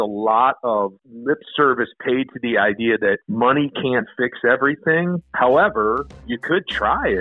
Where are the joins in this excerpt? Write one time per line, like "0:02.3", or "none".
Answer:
0:01.1
0:03.3
0:05.2
0:06.3